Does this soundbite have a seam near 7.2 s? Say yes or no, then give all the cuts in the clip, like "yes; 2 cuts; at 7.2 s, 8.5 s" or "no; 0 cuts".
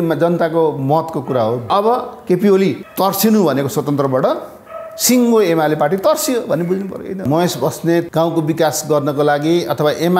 yes; 4 cuts; at 1.7 s, 2.8 s, 7.2 s, 8.1 s